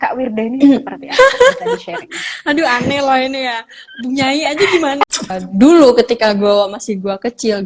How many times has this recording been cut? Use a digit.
1